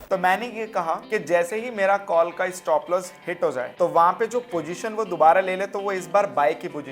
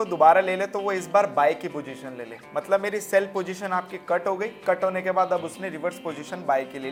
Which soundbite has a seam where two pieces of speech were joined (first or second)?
first